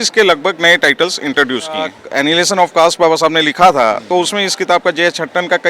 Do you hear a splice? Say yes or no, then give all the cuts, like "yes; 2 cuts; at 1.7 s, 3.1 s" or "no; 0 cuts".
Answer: yes; 1 cut; at 2.0 s